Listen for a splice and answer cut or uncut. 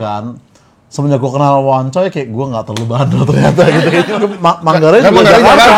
cut